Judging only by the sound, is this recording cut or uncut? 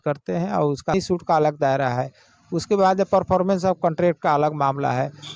cut